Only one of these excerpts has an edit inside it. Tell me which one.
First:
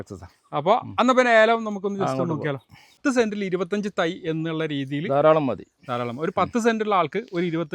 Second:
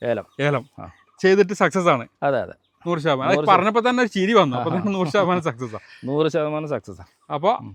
first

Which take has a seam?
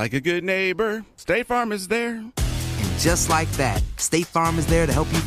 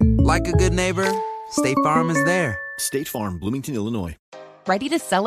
second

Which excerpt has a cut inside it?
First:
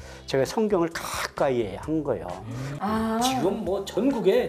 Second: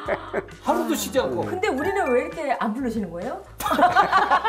first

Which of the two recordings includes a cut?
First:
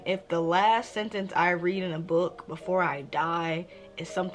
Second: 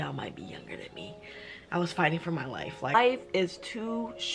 second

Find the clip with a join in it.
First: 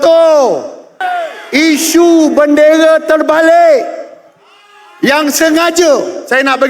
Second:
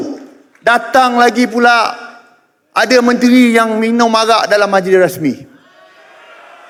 first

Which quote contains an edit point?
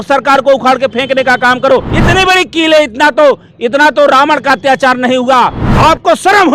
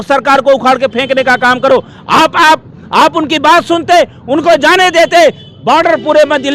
first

